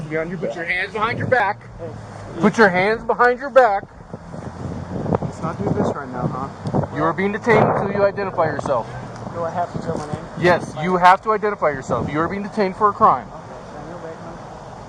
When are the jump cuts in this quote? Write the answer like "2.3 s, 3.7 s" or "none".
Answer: 8.9 s